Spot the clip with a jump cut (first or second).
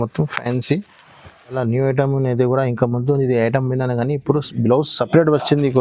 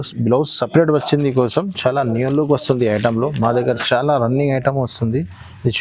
first